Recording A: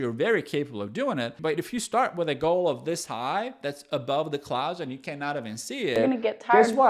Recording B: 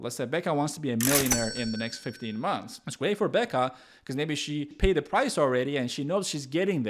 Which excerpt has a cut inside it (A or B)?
A